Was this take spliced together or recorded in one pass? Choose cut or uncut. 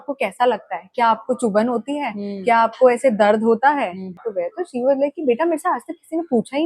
cut